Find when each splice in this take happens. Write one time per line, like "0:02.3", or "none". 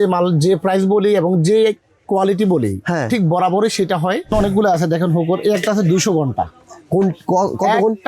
0:04.3